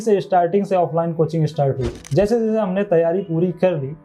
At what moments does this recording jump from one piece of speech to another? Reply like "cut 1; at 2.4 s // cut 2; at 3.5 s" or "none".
cut 1; at 2.0 s